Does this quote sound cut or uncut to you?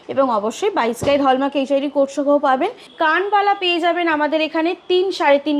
cut